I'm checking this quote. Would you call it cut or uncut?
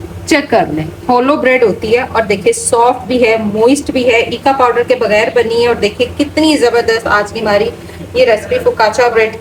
uncut